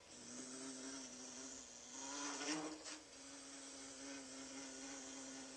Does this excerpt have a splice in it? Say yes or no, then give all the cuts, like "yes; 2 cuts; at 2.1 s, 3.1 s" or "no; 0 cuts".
no; 0 cuts